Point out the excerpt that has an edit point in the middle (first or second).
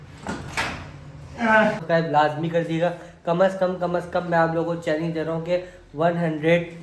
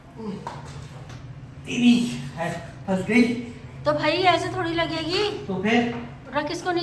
first